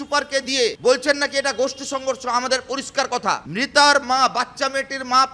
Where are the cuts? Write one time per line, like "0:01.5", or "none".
0:00.8
0:03.5